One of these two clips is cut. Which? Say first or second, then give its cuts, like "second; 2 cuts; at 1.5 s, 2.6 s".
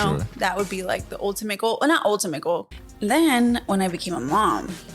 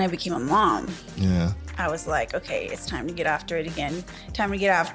first; 1 cut; at 2.7 s